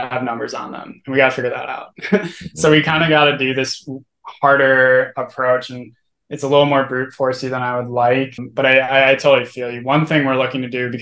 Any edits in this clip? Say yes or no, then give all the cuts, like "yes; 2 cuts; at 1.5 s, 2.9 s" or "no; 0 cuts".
yes; 1 cut; at 8.4 s